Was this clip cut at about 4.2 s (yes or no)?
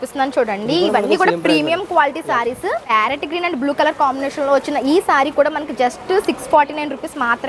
no